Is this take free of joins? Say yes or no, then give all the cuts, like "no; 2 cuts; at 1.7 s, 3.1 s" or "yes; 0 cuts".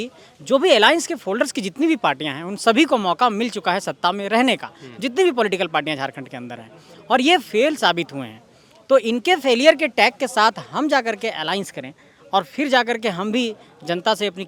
yes; 0 cuts